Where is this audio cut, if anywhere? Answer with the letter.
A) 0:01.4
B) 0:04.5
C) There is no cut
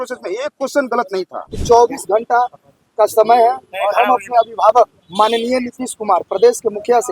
A